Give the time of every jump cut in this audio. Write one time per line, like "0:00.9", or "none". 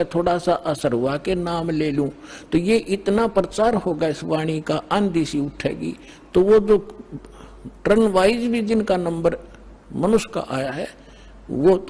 none